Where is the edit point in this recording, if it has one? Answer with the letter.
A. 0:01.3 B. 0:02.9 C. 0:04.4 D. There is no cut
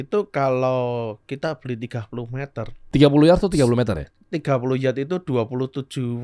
B